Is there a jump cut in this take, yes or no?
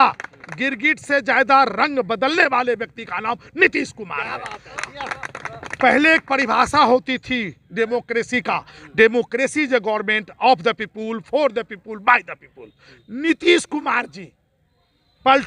no